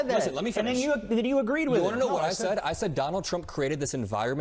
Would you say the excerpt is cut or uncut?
cut